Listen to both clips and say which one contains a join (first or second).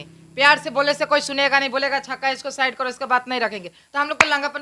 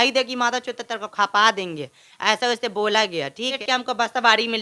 second